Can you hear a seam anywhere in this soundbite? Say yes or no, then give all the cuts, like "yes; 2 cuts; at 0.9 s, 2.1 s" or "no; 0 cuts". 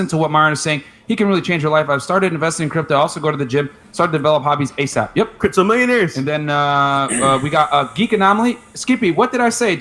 yes; 1 cut; at 4.4 s